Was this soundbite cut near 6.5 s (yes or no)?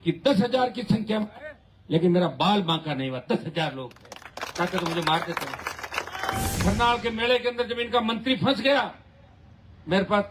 yes